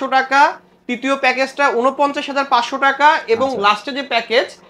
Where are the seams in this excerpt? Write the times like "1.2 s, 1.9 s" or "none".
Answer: none